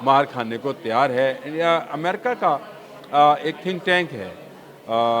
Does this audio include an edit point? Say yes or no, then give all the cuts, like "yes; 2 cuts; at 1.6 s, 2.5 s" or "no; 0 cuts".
no; 0 cuts